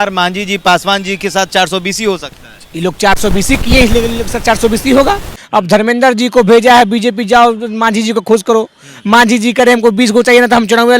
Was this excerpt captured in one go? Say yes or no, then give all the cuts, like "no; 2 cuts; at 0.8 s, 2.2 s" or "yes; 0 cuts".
no; 1 cut; at 5.4 s